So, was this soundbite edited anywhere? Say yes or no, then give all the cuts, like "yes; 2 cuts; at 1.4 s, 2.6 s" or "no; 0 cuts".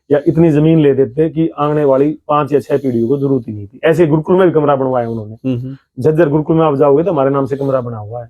no; 0 cuts